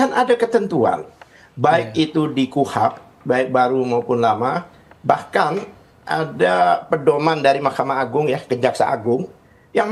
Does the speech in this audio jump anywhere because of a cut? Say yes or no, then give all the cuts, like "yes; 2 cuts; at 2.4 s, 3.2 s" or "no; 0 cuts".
no; 0 cuts